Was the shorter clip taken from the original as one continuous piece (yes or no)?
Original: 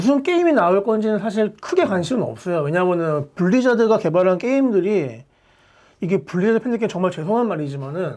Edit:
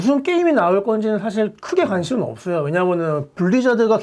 yes